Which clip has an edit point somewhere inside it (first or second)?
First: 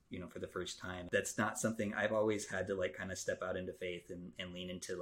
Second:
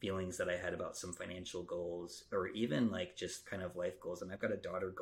first